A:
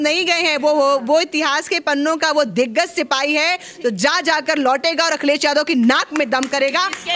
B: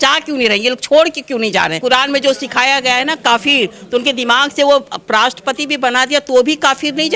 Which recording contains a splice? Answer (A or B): B